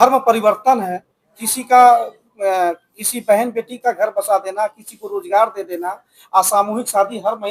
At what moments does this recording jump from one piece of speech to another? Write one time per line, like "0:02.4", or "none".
none